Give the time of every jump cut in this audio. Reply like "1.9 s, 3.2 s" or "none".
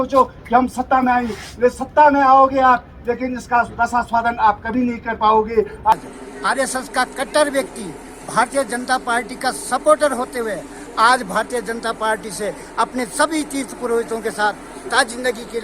5.9 s